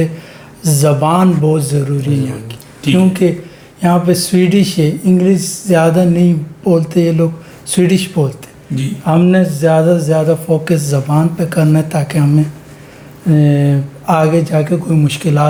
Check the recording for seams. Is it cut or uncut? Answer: uncut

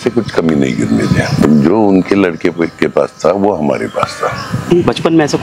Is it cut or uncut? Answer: cut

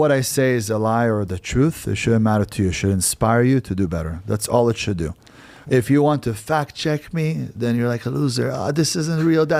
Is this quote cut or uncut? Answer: uncut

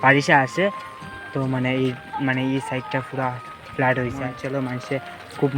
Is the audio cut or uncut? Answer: cut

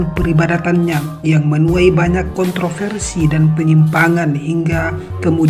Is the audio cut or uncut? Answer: uncut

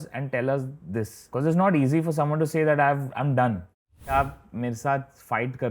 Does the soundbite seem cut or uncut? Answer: cut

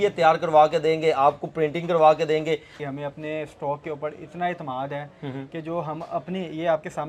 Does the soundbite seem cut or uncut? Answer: cut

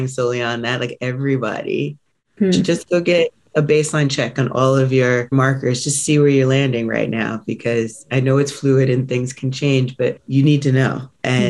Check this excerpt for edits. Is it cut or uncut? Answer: cut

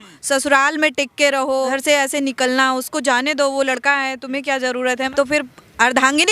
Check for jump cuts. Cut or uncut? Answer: cut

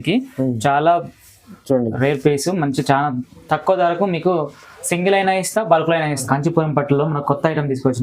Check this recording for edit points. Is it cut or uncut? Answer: cut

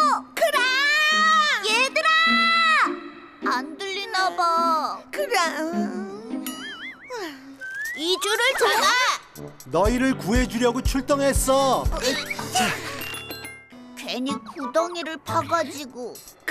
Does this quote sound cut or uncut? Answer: cut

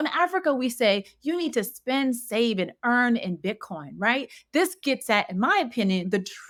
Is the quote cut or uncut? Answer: uncut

